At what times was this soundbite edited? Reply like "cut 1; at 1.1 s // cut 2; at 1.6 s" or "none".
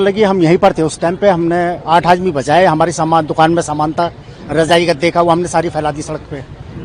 none